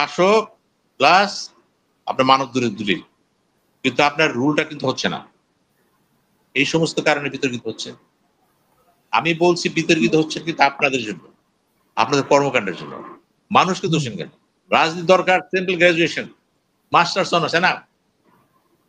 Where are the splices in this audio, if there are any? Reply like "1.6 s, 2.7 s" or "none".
14.6 s